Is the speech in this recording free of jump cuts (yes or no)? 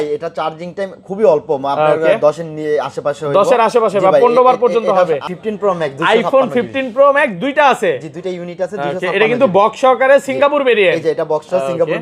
no